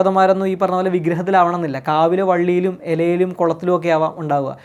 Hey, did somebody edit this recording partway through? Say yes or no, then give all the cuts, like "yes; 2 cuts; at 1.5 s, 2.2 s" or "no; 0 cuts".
no; 0 cuts